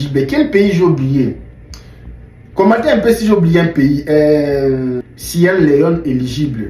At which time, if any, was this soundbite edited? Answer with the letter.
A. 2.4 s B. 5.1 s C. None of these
B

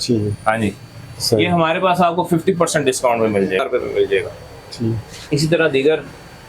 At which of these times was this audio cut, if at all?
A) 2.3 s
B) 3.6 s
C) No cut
B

